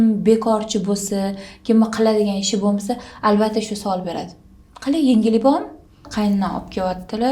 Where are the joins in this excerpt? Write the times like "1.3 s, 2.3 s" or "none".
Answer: 6.1 s